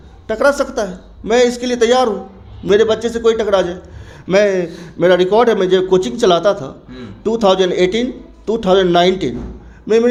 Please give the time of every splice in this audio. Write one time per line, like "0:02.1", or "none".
none